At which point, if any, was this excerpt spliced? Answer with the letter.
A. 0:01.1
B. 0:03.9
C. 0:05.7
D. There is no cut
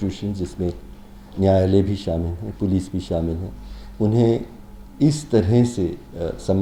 D